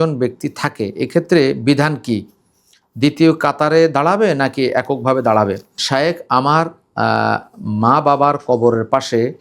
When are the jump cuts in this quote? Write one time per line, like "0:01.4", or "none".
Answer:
0:05.8